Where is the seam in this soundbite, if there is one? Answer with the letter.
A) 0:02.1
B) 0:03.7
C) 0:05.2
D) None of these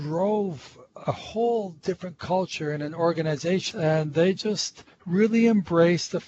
B